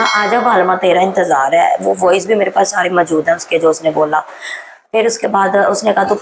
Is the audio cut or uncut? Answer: uncut